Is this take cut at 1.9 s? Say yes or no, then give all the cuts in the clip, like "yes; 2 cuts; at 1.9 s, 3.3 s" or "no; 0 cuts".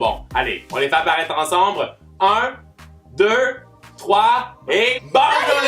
no; 1 cut; at 4.3 s